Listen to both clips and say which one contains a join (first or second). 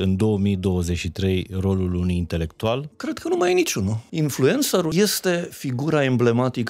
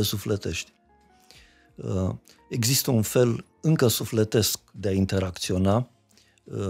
first